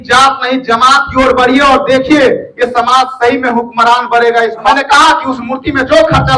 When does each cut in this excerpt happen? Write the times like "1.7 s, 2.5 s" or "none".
4.7 s

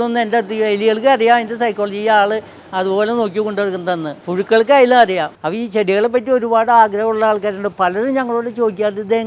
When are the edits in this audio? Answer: 4.2 s, 5.4 s

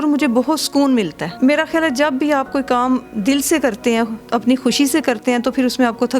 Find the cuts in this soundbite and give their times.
1.2 s, 4.2 s

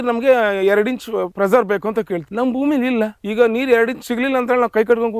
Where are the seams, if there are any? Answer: 1.3 s, 2.3 s, 3.2 s

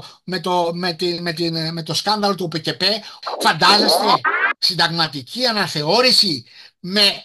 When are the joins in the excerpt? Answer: 3.1 s

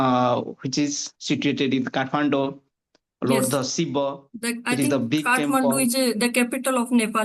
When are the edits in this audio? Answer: none

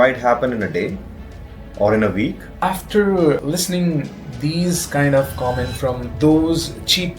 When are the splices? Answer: 2.5 s, 3.4 s, 6.1 s

